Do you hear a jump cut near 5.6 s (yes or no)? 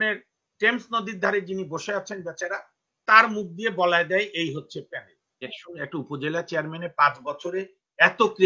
yes